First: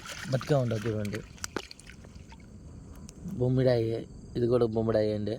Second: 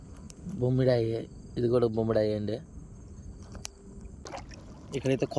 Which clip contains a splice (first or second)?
second